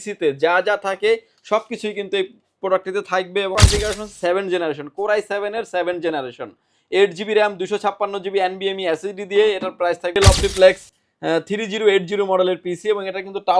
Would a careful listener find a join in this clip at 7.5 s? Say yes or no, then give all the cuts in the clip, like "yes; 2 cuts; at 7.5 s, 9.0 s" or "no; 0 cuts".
no; 2 cuts; at 3.5 s, 10.2 s